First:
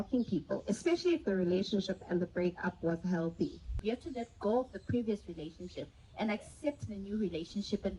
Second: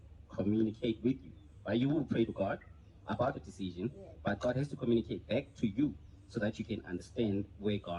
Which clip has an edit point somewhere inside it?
first; 1 cut; at 3.8 s

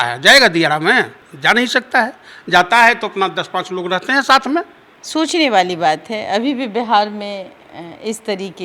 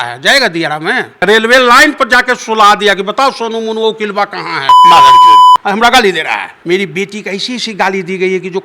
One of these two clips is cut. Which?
second; 2 cuts; at 1.2 s, 6.5 s

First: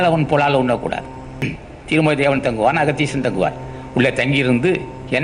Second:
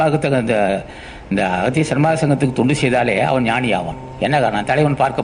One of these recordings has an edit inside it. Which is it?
first; 1 cut; at 1.6 s

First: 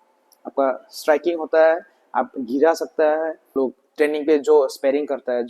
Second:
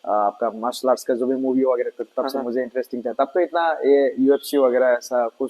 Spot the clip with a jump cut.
first; 1 cut; at 3.4 s

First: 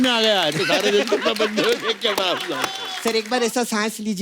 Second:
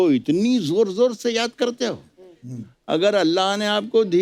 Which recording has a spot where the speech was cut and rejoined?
first; 1 cut; at 2.8 s

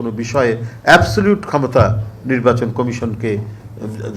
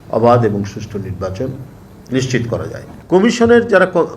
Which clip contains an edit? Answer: second; 1 cut; at 2.9 s

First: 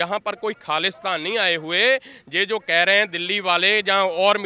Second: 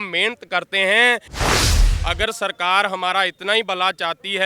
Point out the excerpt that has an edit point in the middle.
second; 1 cut; at 1.7 s

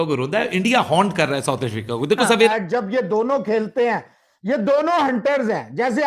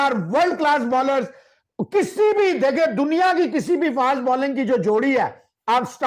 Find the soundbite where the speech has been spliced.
first; 1 cut; at 2.5 s

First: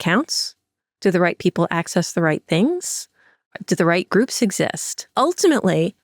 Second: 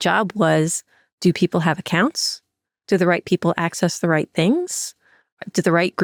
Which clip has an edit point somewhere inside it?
first; 1 cut; at 5.1 s

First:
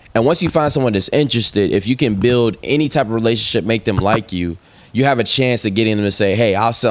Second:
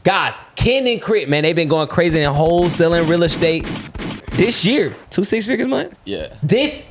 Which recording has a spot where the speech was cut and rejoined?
second; 2 cuts; at 5.0 s, 6.0 s

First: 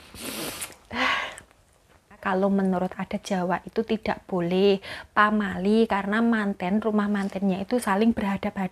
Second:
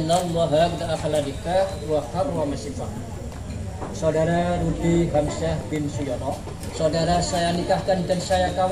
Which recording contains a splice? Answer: first; 1 cut; at 2.2 s

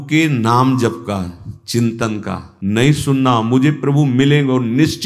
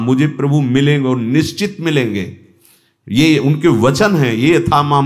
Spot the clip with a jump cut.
first; 1 cut; at 2.4 s

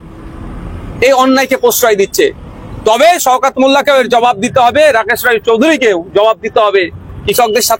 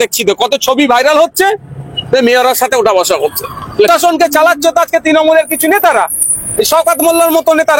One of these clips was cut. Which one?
second; 1 cut; at 3.9 s

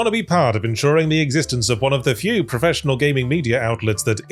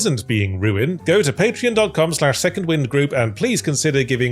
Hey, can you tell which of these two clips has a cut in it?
second; 1 cut; at 0.9 s

